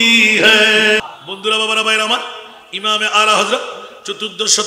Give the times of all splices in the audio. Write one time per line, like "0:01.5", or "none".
0:01.0